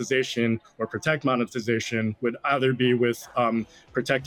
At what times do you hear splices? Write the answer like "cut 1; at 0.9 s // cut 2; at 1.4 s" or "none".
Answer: none